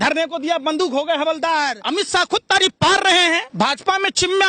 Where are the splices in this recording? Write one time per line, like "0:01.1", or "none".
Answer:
0:01.8
0:03.5